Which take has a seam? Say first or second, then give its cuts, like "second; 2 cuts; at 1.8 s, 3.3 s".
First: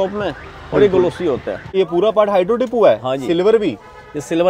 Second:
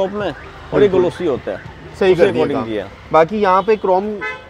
first; 1 cut; at 1.8 s